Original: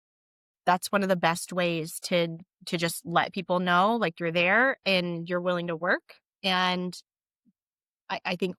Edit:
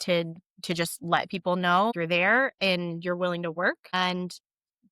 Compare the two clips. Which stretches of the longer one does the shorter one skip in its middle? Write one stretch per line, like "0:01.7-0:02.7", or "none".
0:04.0-0:04.2
0:06.2-0:06.6